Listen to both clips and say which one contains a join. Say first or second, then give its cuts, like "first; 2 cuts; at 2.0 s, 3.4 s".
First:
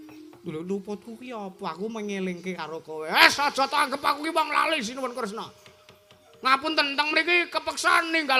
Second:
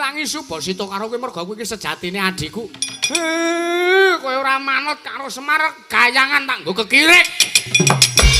second; 1 cut; at 2.9 s